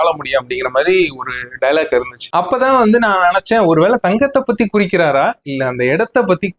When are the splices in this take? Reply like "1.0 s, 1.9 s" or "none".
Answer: none